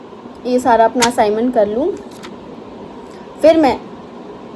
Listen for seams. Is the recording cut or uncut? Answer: uncut